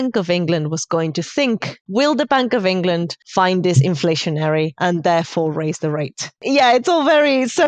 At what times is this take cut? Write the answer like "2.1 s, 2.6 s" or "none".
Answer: 1.8 s, 3.2 s, 4.7 s, 6.4 s